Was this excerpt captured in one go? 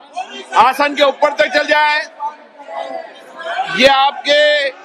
yes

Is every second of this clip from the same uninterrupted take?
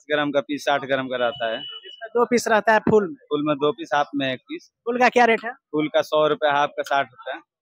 yes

